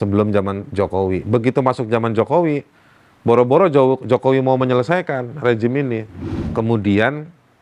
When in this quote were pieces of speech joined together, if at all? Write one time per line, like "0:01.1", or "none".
0:06.2